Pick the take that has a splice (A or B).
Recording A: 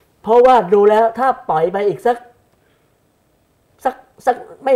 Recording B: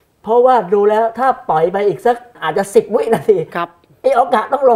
B